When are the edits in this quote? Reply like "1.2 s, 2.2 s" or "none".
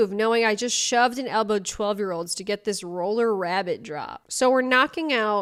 none